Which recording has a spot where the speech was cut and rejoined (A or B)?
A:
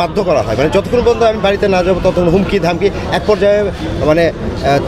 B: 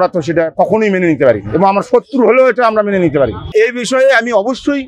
B